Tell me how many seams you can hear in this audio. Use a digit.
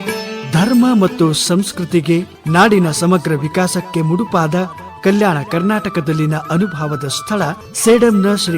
2